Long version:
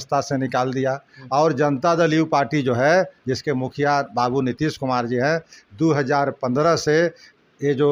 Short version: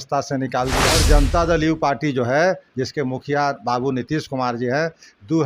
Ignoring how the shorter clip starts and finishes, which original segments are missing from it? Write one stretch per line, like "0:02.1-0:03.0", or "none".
0:01.0-0:01.5

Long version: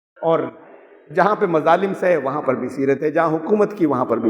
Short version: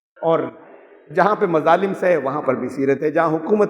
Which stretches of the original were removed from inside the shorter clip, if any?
none

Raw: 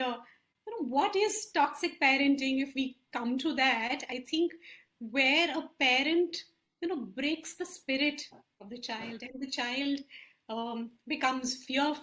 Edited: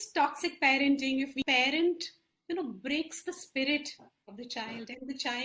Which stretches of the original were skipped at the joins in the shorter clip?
0:02.8-0:05.8

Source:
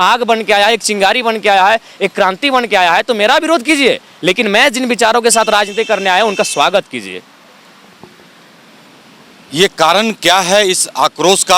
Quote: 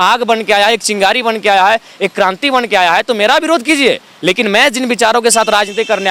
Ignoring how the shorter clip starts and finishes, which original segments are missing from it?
none

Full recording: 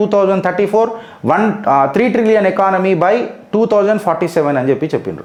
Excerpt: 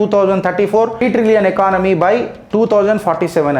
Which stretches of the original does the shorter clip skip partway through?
0:01.0-0:02.0

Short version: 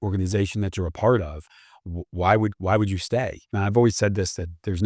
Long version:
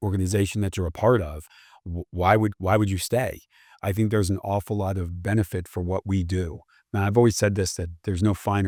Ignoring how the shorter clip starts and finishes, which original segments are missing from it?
0:03.4-0:06.8

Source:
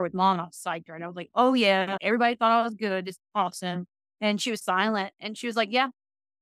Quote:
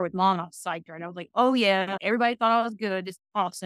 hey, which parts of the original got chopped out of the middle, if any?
none

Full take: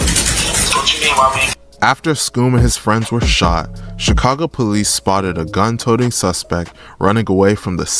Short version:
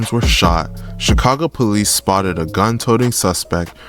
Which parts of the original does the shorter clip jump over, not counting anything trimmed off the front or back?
none

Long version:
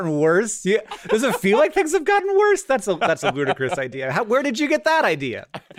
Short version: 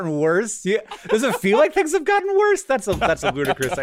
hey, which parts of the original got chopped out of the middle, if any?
none

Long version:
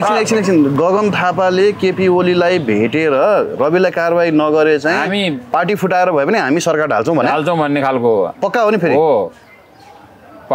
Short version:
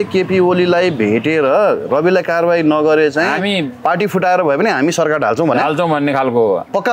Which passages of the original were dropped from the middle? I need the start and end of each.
none

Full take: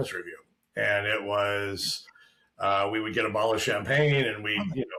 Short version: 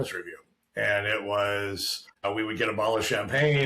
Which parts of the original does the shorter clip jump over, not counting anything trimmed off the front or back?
0:02.2-0:02.8

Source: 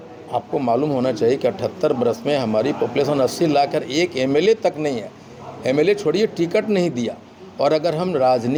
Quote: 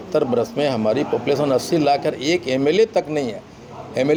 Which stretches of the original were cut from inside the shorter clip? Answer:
none

